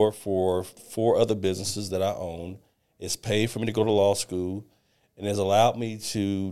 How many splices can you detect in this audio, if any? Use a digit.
0